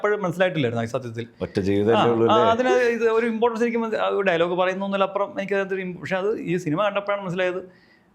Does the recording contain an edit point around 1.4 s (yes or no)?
no